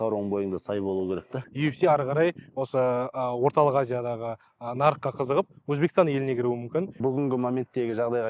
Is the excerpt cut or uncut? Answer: cut